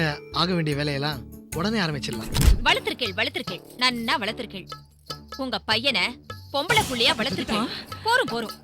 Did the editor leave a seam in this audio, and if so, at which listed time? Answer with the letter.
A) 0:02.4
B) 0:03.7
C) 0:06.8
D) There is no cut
A